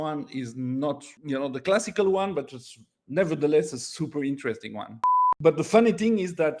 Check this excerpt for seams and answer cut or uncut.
cut